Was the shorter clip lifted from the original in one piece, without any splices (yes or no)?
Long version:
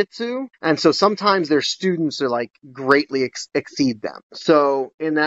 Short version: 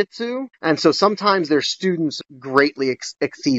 no